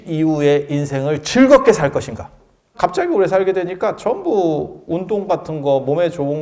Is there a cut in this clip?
yes; 1 cut; at 2.7 s

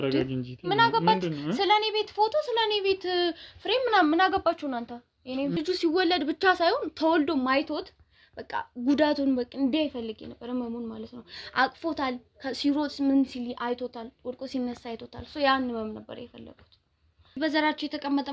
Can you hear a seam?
yes; 2 cuts; at 5.6 s, 17.4 s

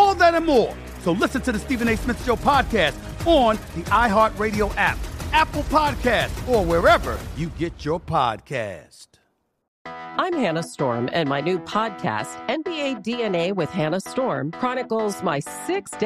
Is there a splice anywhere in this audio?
yes; 1 cut; at 9.6 s

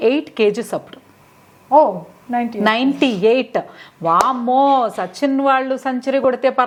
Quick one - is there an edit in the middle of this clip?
no; 0 cuts

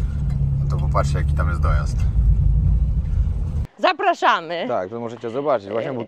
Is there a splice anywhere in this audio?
yes; 1 cut; at 3.7 s

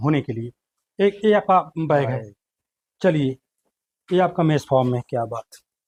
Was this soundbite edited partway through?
no; 0 cuts

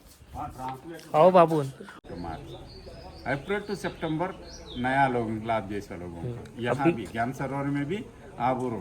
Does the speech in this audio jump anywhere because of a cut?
yes; 1 cut; at 2.0 s

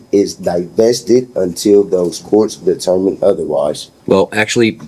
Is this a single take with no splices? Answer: no; 1 cut; at 3.9 s

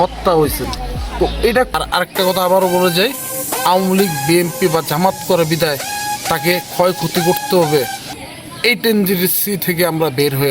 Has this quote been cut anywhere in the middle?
yes; 1 cut; at 1.7 s

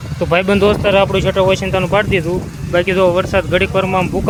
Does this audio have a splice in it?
no; 0 cuts

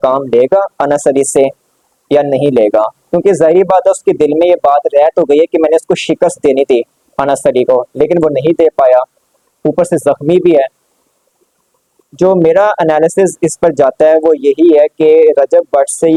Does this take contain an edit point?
no; 0 cuts

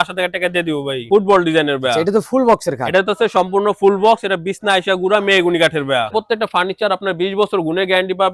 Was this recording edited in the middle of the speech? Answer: yes; 2 cuts; at 1.0 s, 6.1 s

